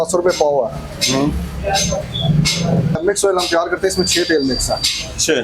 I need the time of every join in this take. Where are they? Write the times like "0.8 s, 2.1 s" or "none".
3.0 s